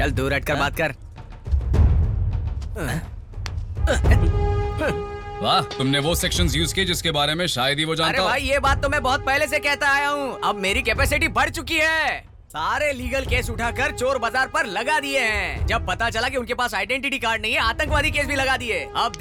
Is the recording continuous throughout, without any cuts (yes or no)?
yes